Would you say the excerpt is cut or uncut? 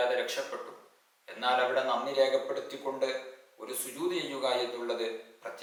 uncut